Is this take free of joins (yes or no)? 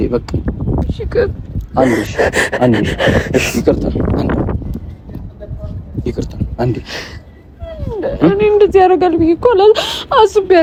yes